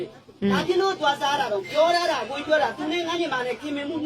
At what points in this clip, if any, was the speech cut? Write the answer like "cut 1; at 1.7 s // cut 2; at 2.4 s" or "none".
none